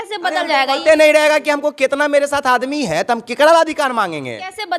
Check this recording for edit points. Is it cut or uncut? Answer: uncut